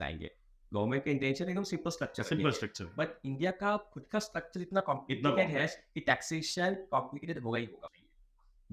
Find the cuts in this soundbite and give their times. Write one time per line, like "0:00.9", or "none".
0:07.8